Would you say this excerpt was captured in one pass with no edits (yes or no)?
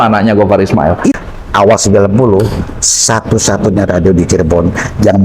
no